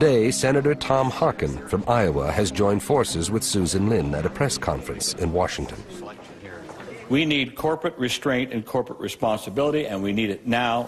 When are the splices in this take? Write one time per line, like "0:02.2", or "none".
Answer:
0:08.1